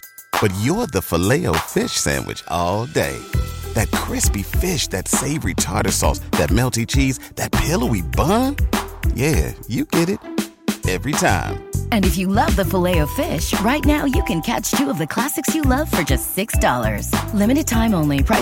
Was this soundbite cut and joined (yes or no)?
no